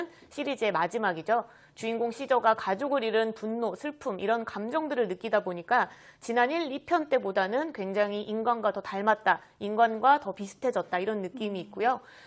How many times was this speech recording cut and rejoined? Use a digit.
0